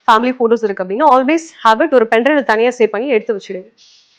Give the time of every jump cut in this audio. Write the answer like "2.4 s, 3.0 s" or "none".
none